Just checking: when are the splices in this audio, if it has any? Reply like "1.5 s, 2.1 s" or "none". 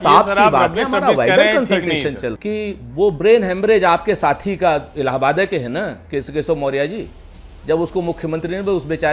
2.3 s